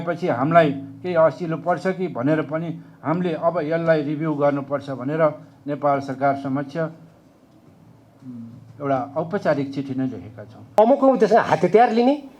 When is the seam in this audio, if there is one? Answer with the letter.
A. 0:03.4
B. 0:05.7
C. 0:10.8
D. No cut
C